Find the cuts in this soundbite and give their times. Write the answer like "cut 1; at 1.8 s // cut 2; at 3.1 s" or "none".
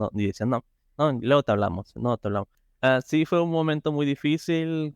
cut 1; at 2.6 s